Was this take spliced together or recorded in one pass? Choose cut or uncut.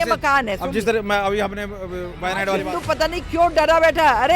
cut